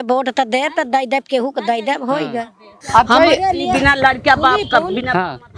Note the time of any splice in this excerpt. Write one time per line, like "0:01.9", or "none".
0:02.8